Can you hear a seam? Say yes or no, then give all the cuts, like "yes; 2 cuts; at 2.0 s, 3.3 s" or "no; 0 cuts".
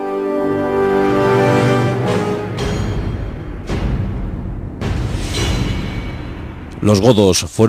yes; 1 cut; at 4.0 s